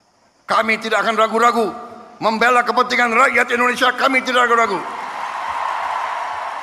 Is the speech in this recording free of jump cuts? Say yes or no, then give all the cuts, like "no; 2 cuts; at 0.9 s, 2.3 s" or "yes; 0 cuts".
yes; 0 cuts